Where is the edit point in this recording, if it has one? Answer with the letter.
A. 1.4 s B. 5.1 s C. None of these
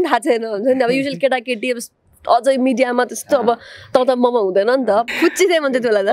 B